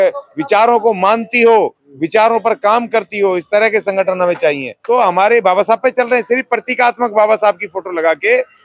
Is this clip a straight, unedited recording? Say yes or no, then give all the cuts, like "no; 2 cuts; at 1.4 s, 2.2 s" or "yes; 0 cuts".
no; 1 cut; at 4.7 s